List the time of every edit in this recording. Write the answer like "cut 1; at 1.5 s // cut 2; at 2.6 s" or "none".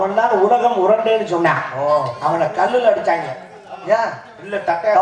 none